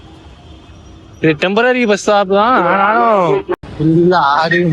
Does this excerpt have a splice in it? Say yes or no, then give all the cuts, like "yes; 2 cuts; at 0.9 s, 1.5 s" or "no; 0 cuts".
yes; 1 cut; at 3.6 s